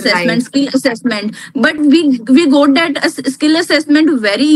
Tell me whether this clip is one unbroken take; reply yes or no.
yes